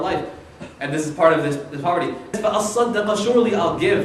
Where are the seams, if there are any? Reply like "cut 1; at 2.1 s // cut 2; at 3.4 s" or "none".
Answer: none